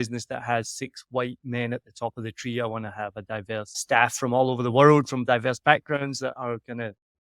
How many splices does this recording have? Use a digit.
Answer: 1